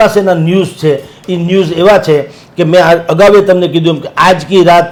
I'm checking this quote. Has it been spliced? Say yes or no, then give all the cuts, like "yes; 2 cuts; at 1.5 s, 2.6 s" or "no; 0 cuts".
no; 0 cuts